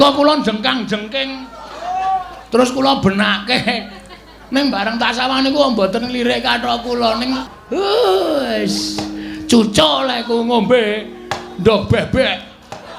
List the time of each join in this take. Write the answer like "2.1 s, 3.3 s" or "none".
7.5 s